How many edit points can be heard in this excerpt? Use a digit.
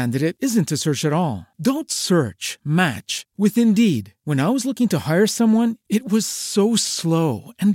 0